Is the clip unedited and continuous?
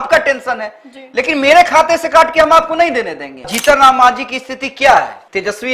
no; 1 cut; at 3.5 s

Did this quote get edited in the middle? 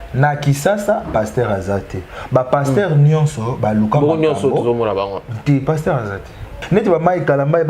yes; 1 cut; at 6.5 s

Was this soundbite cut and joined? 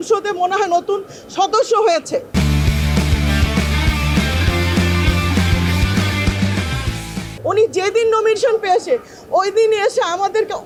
no; 0 cuts

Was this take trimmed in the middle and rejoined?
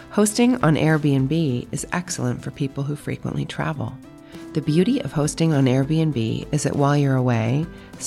no; 0 cuts

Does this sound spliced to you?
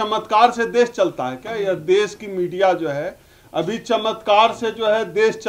no; 0 cuts

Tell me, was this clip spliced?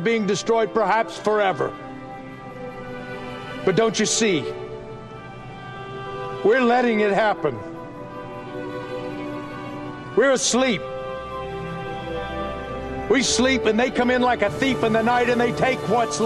no; 0 cuts

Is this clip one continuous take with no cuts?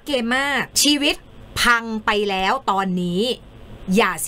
yes; 0 cuts

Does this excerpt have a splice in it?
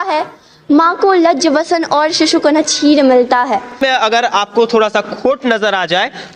yes; 1 cut; at 3.8 s

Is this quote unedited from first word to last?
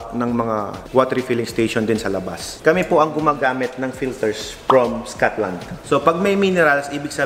no; 2 cuts; at 2.6 s, 5.7 s

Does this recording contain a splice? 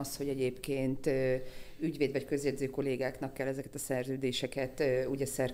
no; 0 cuts

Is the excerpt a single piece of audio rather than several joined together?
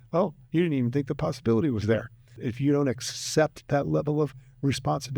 no; 1 cut; at 2.4 s

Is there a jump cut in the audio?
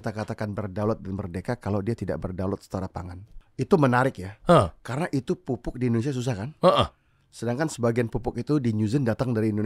no; 0 cuts

